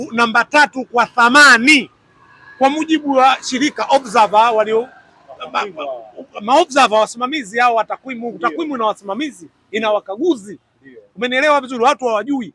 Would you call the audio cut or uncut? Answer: uncut